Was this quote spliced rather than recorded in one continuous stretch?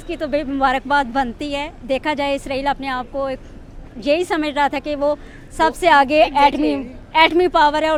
no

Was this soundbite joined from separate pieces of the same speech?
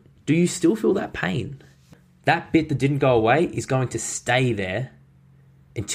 yes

